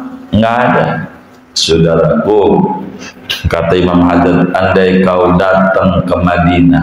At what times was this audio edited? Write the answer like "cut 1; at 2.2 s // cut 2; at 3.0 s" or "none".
cut 1; at 1.5 s

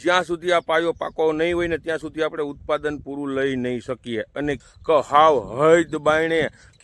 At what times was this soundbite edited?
cut 1; at 4.6 s

